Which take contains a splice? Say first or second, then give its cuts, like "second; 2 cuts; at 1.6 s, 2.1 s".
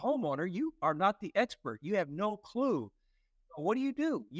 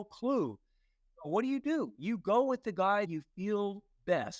second; 1 cut; at 3.1 s